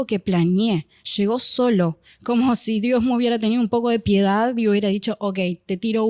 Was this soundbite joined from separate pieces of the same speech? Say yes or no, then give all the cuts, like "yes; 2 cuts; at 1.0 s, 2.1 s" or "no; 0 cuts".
no; 0 cuts